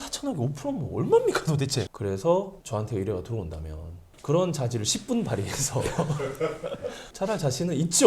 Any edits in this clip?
yes; 2 cuts; at 1.9 s, 7.0 s

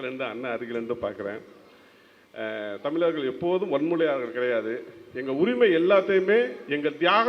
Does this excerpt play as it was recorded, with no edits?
yes; 0 cuts

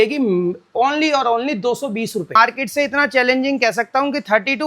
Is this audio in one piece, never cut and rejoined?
no; 1 cut; at 2.4 s

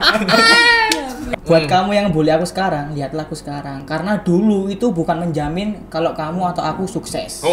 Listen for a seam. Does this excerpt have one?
yes; 2 cuts; at 1.2 s, 3.8 s

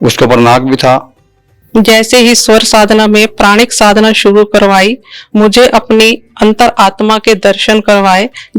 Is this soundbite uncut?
no; 1 cut; at 1.6 s

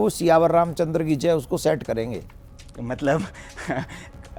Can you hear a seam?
no; 0 cuts

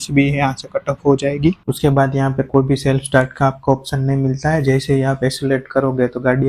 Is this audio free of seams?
no; 1 cut; at 1.6 s

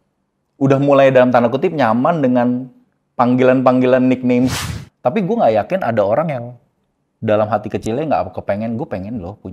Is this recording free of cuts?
no; 1 cut; at 4.6 s

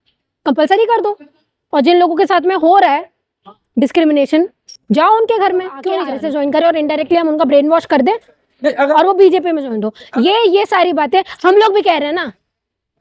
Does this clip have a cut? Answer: yes; 1 cut; at 6.1 s

